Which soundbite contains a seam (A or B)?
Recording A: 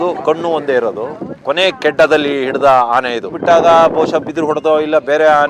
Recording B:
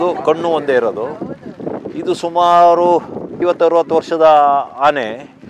A